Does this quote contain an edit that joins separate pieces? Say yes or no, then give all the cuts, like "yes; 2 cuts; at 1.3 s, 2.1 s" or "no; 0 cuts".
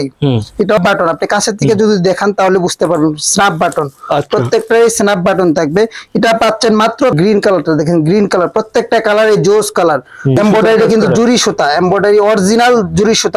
yes; 3 cuts; at 0.8 s, 7.2 s, 10.4 s